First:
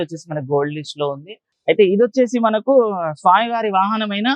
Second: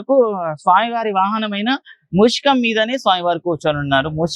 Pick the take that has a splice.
first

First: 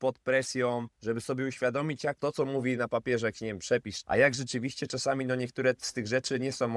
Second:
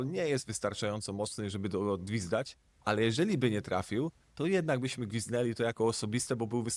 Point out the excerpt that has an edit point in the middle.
first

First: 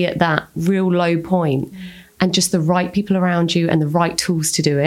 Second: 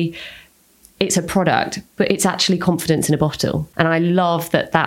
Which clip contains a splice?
second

